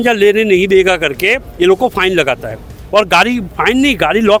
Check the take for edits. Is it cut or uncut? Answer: uncut